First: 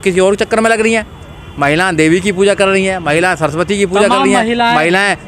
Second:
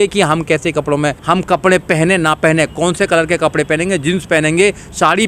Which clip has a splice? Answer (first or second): second